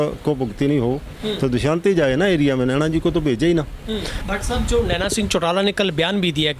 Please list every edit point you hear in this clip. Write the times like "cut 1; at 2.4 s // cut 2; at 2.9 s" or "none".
cut 1; at 4.1 s